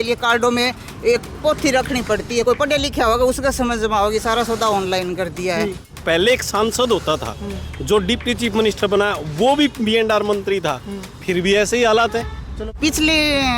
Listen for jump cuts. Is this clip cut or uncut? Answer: cut